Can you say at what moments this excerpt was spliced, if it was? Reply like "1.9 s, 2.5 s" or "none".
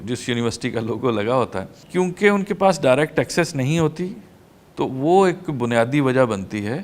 1.8 s